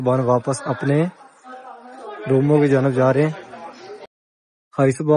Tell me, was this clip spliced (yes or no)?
no